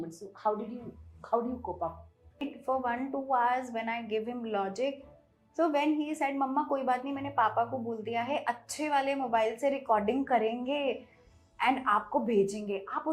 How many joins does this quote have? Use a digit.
1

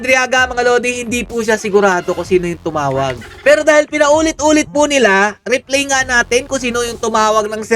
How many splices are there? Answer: 1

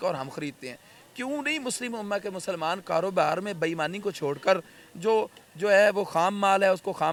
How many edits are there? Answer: 0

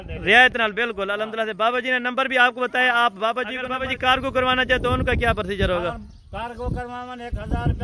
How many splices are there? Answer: 1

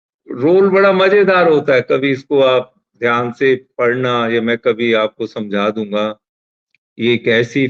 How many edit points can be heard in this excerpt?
0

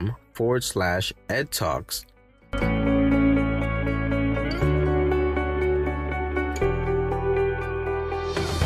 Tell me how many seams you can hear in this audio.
1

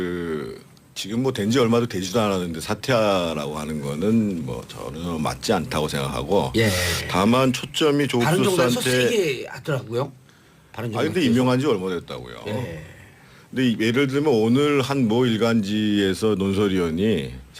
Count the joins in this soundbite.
1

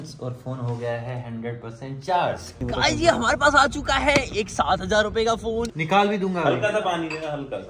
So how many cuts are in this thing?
2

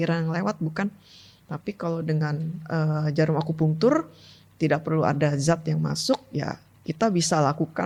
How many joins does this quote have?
0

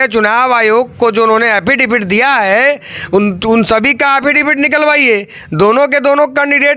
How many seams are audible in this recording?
0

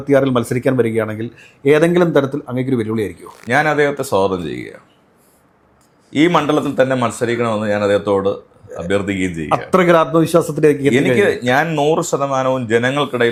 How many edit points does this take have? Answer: 0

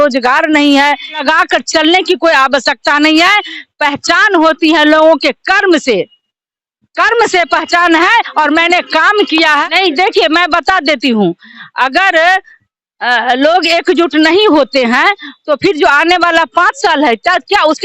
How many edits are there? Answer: 2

